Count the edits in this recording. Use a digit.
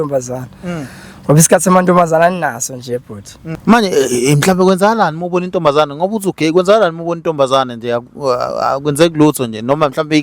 1